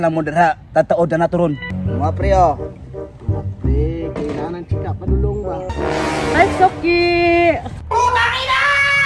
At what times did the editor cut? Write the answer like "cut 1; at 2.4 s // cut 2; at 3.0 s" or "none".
cut 1; at 1.7 s // cut 2; at 5.7 s